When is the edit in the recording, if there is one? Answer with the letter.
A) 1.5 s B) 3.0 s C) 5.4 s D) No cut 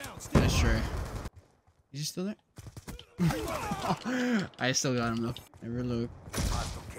C